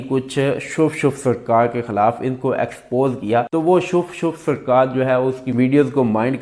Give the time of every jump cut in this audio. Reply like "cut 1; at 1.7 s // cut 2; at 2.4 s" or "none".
none